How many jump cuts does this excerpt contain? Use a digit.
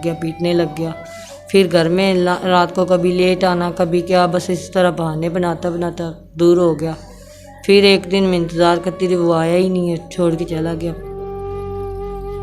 1